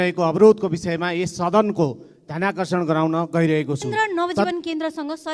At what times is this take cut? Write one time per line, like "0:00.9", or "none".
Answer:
0:03.9